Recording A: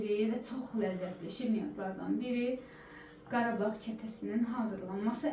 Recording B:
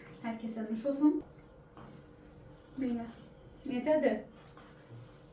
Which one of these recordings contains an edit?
B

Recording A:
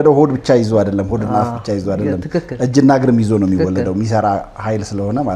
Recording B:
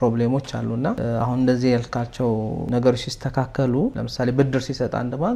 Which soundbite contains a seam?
B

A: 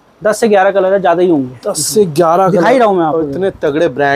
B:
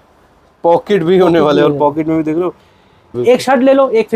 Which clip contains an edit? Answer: B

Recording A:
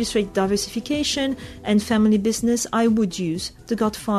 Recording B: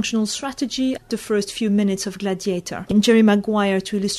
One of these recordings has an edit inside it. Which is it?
B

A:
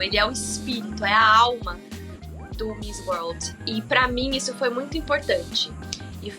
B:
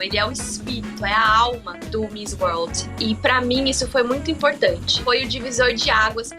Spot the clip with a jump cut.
B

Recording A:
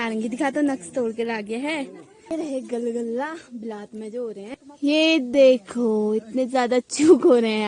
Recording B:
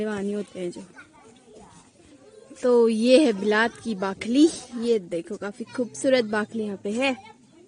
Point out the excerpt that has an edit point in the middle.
A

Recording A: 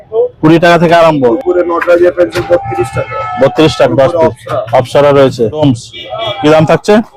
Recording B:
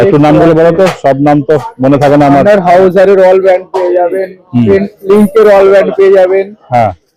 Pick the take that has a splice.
A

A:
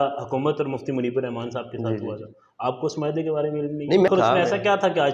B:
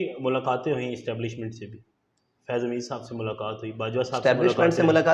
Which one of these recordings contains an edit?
A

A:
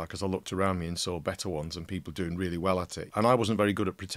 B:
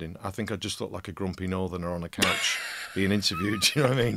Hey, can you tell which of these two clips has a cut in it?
A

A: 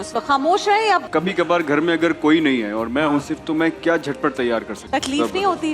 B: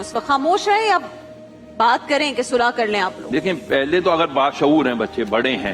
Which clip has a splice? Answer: A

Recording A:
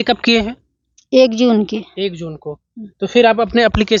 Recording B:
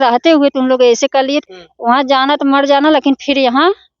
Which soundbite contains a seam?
B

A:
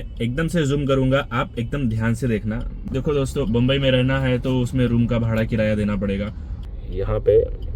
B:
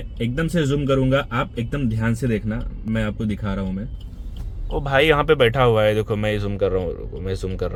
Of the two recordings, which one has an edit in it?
A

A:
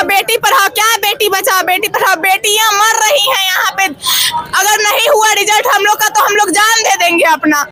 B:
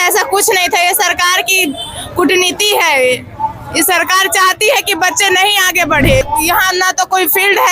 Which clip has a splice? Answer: B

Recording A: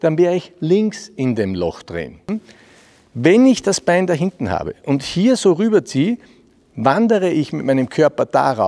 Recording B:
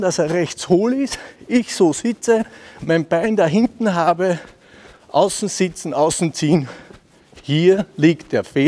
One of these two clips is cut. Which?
A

